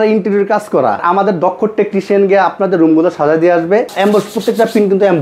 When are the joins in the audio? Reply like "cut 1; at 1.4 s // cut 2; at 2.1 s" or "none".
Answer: cut 1; at 1.0 s // cut 2; at 3.9 s

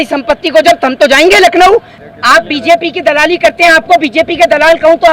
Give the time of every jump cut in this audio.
cut 1; at 1.9 s

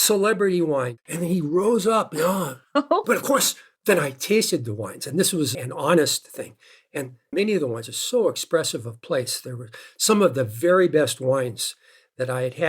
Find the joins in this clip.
cut 1; at 0.9 s

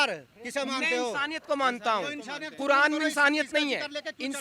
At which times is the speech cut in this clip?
none

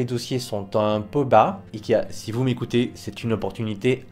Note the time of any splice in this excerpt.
cut 1; at 1.6 s

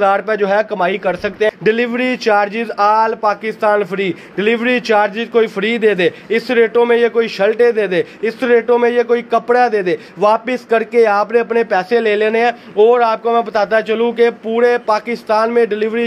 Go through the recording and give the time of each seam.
cut 1; at 1.6 s

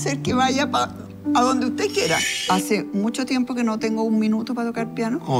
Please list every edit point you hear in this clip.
cut 1; at 2.3 s

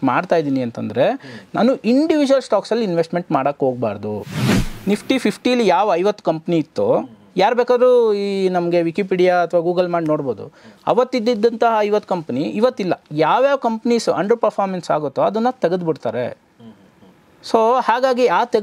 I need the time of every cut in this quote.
cut 1; at 4.6 s // cut 2; at 13.1 s

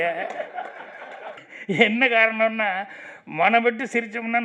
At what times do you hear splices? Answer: cut 1; at 1.4 s

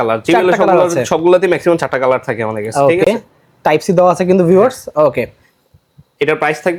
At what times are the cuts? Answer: none

